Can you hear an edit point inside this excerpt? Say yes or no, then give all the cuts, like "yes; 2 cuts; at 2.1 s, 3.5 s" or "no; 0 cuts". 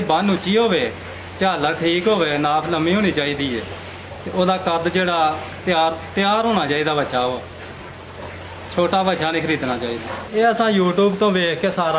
yes; 1 cut; at 10.2 s